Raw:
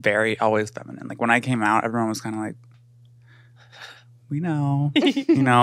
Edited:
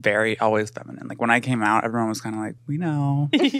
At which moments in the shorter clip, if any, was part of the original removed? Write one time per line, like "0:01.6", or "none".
0:02.6